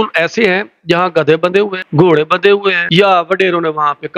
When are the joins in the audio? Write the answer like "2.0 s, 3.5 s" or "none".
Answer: 1.8 s, 2.8 s